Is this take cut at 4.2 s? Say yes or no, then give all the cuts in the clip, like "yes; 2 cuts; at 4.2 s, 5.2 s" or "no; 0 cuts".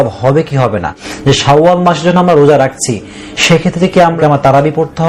yes; 2 cuts; at 1.1 s, 4.2 s